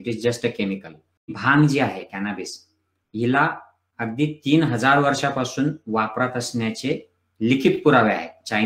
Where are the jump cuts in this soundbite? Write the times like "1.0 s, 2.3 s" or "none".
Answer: 1.4 s